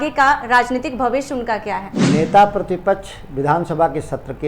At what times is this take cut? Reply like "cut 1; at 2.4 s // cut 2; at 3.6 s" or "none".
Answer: cut 1; at 1.9 s